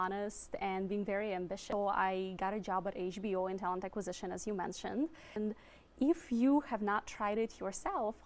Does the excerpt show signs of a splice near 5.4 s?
yes; 2 cuts; at 1.6 s, 5.4 s

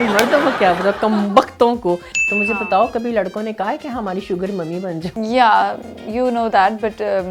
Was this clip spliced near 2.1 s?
yes; 2 cuts; at 2.1 s, 5.1 s

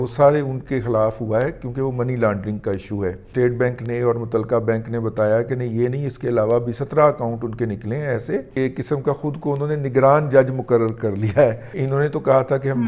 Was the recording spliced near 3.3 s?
yes; 3 cuts; at 3.3 s, 8.5 s, 11.8 s

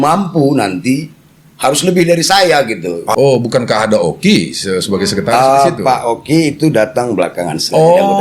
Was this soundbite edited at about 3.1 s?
yes; 1 cut; at 3.1 s

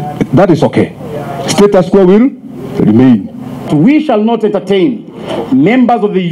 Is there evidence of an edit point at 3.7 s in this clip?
yes; 1 cut; at 3.7 s

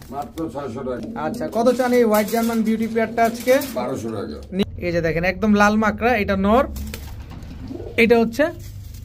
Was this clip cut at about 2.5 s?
no; 2 cuts; at 1.0 s, 4.6 s

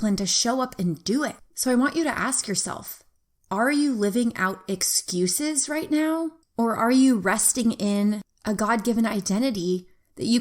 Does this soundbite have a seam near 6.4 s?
yes; 2 cuts; at 6.4 s, 8.3 s

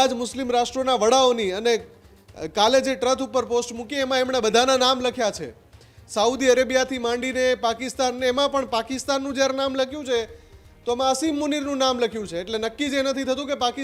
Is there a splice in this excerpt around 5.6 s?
no; 0 cuts

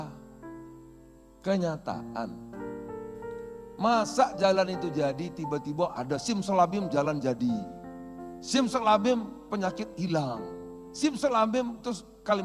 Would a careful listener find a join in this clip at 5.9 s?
no; 2 cuts; at 2.6 s, 3.8 s

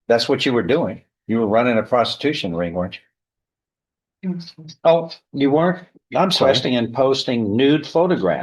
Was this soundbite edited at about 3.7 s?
no; 1 cut; at 6.4 s

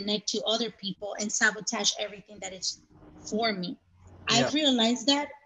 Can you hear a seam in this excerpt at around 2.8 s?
no; 0 cuts

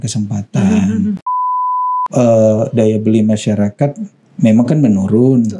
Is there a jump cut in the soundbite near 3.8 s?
no; 1 cut; at 1.5 s

